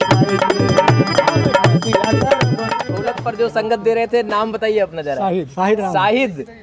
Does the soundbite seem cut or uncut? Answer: cut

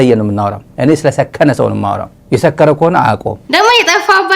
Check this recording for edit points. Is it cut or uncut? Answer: cut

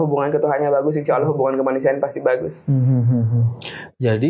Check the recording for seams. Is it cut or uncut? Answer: uncut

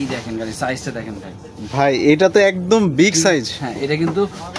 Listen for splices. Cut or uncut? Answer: uncut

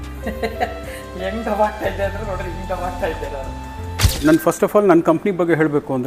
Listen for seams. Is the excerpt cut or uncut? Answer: cut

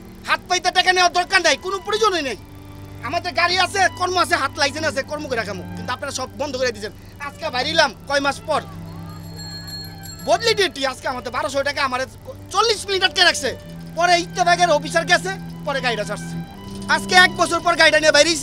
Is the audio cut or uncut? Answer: cut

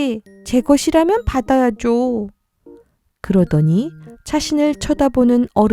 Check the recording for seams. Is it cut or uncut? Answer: uncut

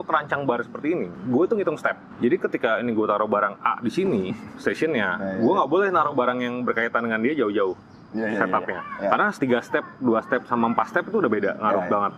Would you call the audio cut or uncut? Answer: uncut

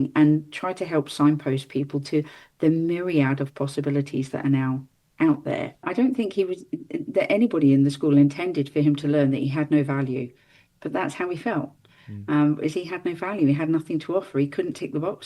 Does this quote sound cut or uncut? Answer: cut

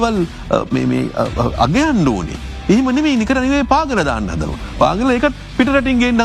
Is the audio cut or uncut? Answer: uncut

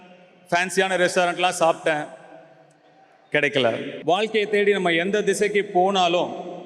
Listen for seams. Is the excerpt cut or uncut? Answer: cut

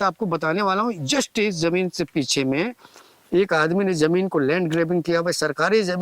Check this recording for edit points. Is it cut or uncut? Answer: uncut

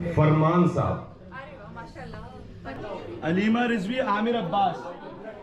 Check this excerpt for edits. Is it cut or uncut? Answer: cut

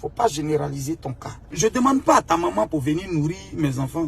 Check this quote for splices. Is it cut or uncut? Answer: cut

